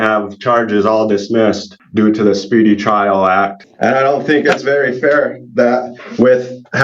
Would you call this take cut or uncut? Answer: cut